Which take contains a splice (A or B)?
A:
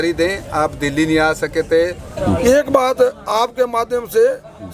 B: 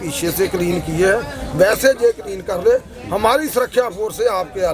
A